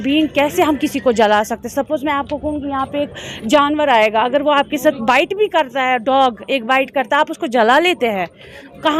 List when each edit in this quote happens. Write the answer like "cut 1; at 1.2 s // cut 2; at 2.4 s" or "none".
none